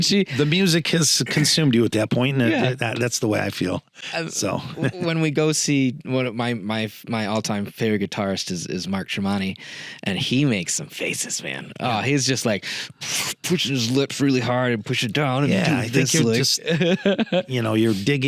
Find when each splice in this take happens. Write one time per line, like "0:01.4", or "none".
none